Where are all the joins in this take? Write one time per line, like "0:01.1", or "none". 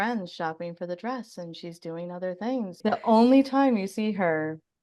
0:02.8